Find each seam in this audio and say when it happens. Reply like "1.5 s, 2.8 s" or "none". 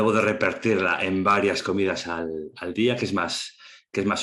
none